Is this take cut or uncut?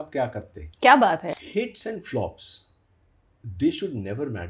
cut